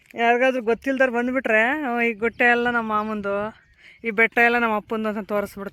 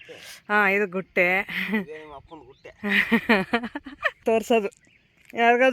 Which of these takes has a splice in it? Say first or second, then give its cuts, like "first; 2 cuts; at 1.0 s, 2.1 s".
second; 1 cut; at 4.2 s